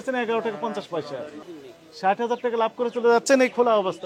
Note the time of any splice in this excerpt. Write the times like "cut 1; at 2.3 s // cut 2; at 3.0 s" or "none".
cut 1; at 1.4 s